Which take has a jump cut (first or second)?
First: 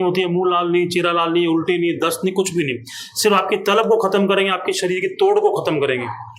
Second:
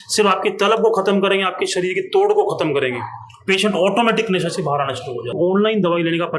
second